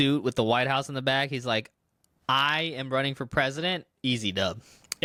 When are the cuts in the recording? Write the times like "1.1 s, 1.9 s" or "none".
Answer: none